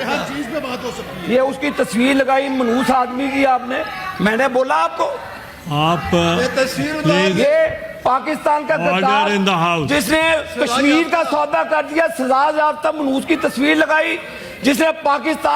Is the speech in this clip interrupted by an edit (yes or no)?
no